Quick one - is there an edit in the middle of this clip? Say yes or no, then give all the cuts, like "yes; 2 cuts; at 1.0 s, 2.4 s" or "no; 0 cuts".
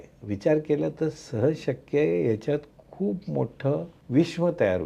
yes; 1 cut; at 4.0 s